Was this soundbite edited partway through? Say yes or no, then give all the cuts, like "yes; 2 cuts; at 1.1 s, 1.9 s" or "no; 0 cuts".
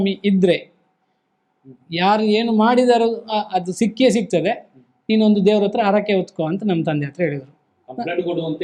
no; 0 cuts